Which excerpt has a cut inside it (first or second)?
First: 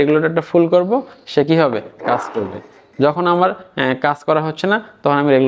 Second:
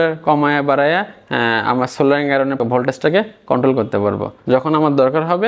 second